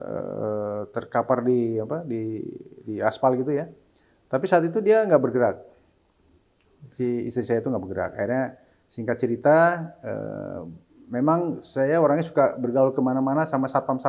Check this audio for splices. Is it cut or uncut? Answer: uncut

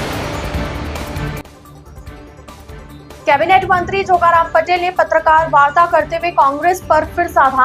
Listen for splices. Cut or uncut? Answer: cut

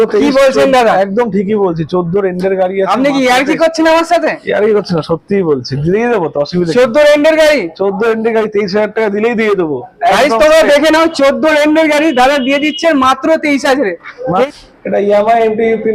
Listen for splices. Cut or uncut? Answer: cut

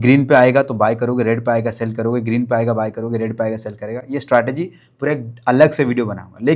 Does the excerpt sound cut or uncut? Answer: uncut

